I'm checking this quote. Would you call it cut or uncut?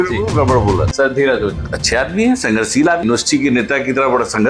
cut